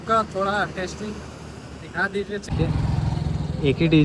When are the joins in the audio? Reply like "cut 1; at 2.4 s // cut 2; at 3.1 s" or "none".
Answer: cut 1; at 2.5 s